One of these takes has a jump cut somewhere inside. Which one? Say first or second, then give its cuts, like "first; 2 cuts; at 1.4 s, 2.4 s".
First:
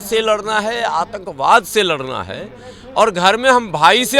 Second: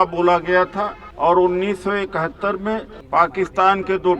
second; 2 cuts; at 1.0 s, 2.9 s